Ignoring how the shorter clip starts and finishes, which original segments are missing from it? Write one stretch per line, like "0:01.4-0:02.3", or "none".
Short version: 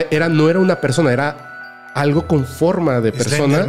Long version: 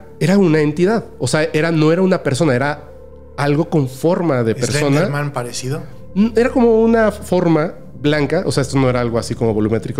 none